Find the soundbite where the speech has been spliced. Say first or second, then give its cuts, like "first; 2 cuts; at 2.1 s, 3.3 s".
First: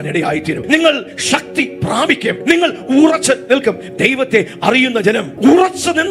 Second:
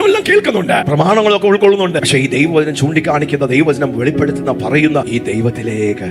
second; 3 cuts; at 0.9 s, 2.0 s, 5.1 s